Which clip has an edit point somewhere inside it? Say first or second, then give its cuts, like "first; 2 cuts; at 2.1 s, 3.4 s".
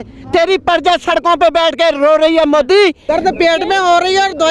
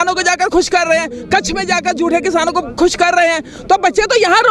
first; 1 cut; at 3.0 s